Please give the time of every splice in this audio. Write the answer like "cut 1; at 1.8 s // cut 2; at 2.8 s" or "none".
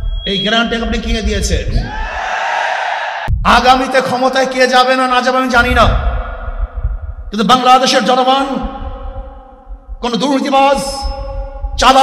cut 1; at 3.3 s